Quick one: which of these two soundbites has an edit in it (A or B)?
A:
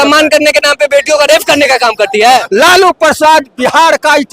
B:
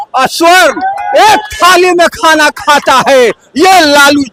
A